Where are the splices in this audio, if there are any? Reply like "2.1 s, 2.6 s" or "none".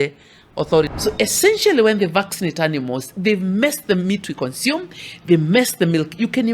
0.9 s